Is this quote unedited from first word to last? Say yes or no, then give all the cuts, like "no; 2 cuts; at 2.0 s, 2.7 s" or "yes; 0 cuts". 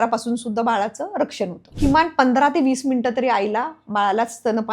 no; 1 cut; at 1.8 s